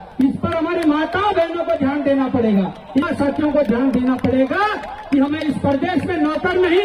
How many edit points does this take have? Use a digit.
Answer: 1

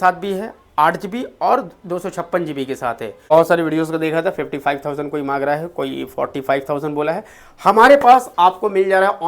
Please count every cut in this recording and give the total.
1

